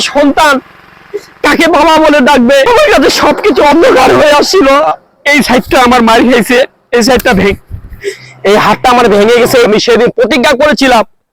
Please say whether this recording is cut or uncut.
cut